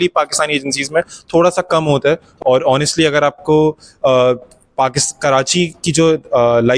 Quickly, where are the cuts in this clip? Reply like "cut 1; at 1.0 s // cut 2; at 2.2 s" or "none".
cut 1; at 2.3 s